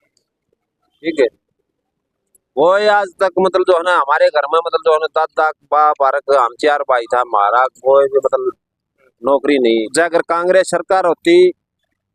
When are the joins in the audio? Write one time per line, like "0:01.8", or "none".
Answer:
0:09.9

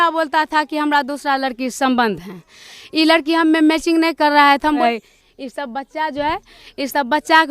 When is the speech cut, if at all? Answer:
0:04.8

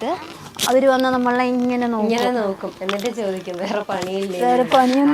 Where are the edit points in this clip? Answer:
0:02.7

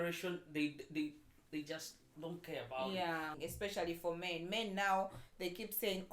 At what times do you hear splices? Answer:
0:03.3

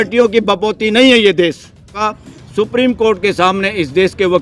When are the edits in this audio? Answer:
0:02.0

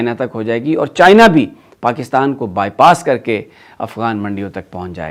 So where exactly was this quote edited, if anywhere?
none

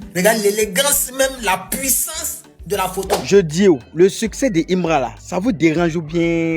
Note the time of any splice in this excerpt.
0:03.2

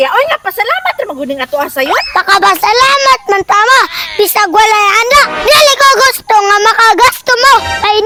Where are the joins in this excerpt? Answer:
none

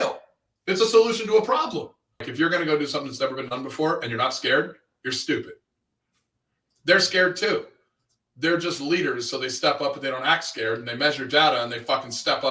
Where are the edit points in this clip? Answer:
0:02.3

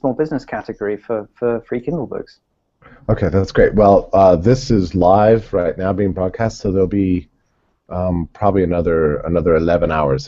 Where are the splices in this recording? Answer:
0:03.8

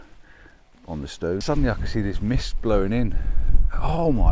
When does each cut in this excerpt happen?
0:01.4

